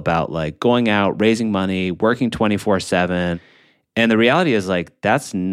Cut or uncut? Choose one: cut